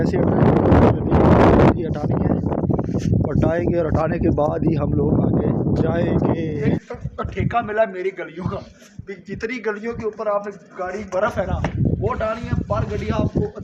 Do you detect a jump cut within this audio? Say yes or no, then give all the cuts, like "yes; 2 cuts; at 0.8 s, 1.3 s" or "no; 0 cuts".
yes; 1 cut; at 6.8 s